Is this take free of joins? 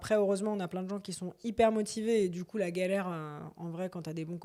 yes; 0 cuts

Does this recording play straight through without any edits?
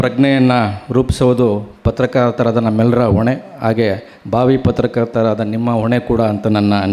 yes; 0 cuts

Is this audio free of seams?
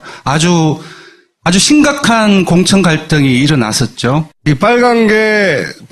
no; 1 cut; at 2.0 s

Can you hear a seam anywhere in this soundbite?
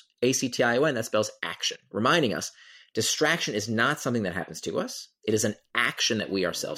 no; 0 cuts

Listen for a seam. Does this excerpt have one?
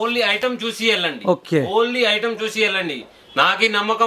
no; 0 cuts

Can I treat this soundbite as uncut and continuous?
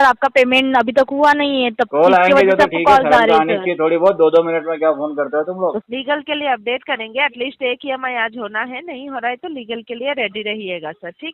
no; 1 cut; at 5.8 s

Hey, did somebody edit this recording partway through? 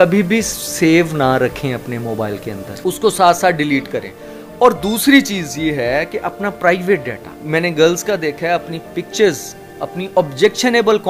no; 0 cuts

